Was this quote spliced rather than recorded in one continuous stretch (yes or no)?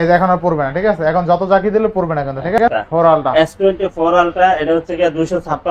yes